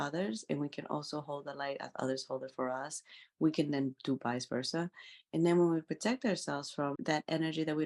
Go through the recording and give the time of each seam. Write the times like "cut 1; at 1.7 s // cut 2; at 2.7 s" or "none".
cut 1; at 6.9 s

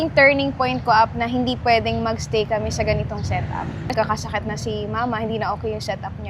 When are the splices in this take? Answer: cut 1; at 3.9 s

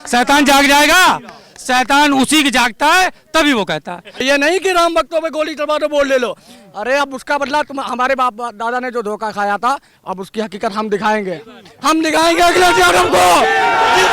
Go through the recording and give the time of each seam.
cut 1; at 4.2 s

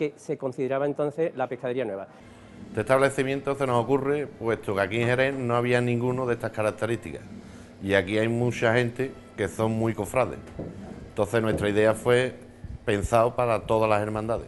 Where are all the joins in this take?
cut 1; at 2.4 s

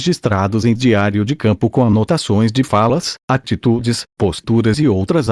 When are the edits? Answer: none

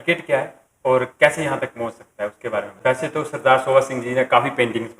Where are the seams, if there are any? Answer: cut 1; at 2.8 s

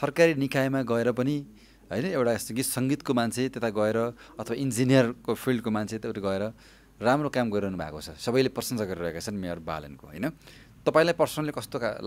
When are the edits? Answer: none

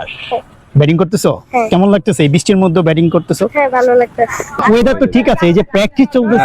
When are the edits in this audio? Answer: cut 1; at 4.6 s

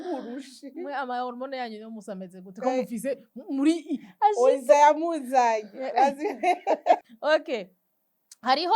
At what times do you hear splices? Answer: cut 1; at 7.0 s

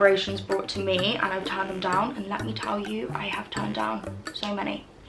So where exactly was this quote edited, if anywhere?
none

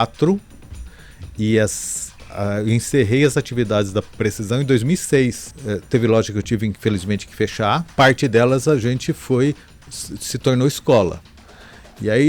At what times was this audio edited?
cut 1; at 5.5 s // cut 2; at 7.9 s

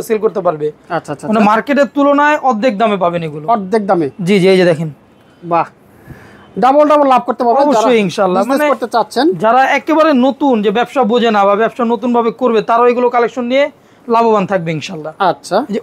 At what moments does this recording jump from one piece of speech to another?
none

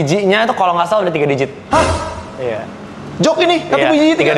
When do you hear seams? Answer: none

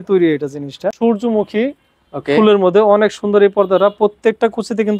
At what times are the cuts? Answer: cut 1; at 1.0 s

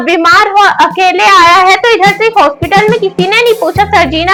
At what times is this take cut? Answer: none

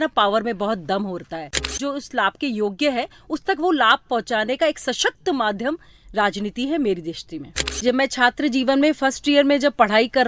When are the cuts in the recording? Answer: cut 1; at 1.8 s // cut 2; at 7.6 s

